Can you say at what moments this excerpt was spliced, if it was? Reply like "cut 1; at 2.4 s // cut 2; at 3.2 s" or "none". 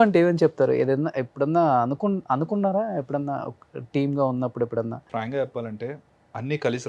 cut 1; at 5.1 s